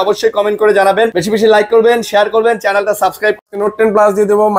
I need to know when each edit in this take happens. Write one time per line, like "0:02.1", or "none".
0:01.2
0:03.4